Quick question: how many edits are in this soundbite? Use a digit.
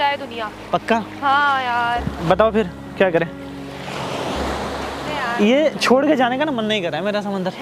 0